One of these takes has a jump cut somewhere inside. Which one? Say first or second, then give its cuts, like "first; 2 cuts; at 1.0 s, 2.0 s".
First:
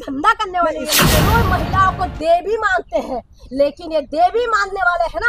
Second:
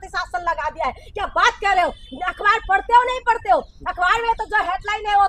first; 1 cut; at 1.0 s